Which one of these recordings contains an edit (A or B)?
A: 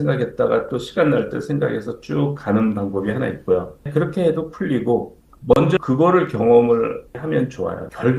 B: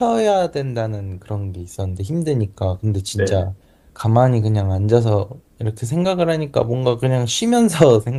A